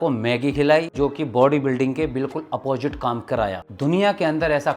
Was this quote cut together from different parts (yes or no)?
yes